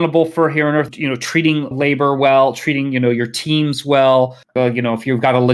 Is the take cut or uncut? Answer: cut